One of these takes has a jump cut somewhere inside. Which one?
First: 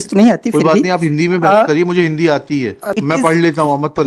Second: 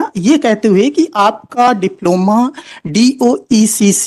first; 1 cut; at 2.9 s

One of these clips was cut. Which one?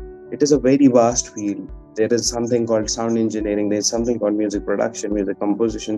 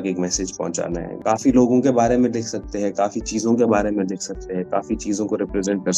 second; 1 cut; at 1.1 s

